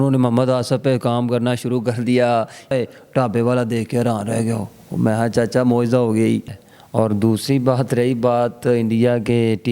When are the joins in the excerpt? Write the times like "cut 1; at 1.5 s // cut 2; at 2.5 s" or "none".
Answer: cut 1; at 2.7 s // cut 2; at 6.6 s